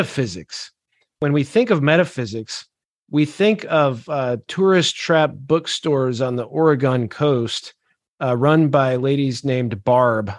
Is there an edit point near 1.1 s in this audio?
yes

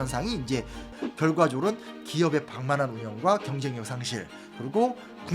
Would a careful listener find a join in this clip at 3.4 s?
no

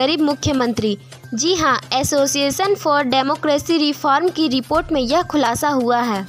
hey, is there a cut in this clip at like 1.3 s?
no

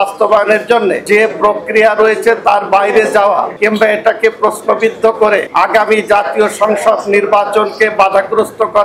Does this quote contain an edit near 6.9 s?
no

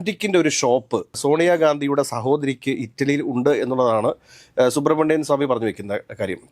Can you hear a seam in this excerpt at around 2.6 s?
no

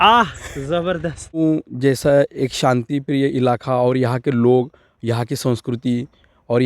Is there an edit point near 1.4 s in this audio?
yes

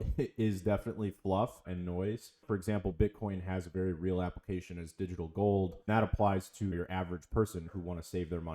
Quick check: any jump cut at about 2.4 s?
no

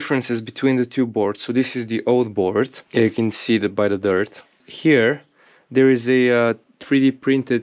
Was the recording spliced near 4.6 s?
yes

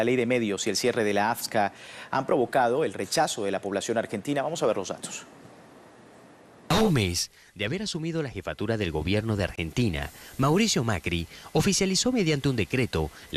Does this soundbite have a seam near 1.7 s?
no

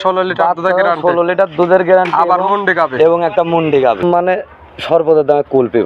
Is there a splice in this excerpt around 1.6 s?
no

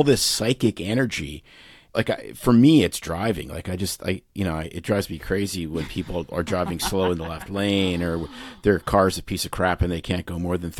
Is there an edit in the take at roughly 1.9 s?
yes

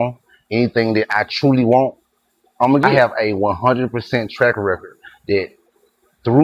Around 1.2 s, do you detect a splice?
no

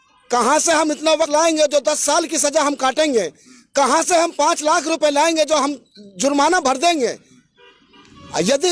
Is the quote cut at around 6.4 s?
no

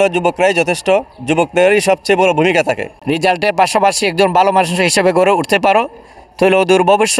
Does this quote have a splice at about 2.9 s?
yes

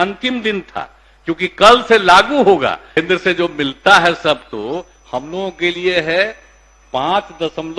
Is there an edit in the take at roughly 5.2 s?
no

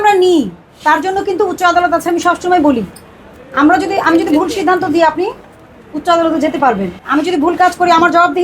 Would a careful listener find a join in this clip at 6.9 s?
yes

